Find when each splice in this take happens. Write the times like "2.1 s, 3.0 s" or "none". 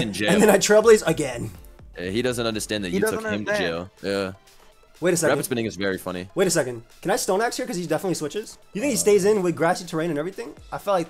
8.6 s